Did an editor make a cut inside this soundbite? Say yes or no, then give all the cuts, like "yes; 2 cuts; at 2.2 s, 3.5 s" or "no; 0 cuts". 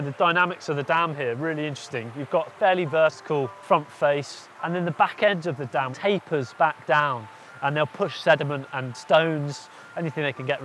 yes; 3 cuts; at 3.6 s, 5.9 s, 8.9 s